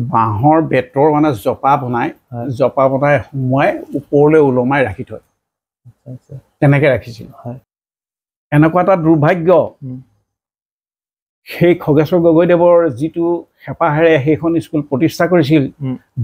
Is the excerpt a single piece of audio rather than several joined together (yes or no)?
no